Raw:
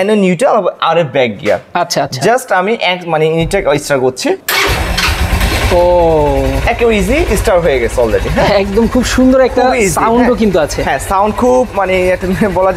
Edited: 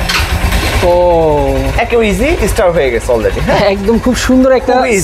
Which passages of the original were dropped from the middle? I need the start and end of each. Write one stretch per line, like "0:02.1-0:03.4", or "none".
none